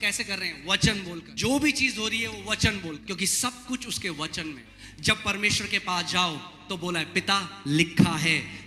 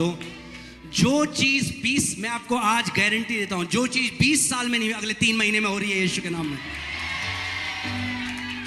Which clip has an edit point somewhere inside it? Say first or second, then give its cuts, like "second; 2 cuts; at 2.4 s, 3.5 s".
first; 3 cuts; at 1.3 s, 3.0 s, 4.7 s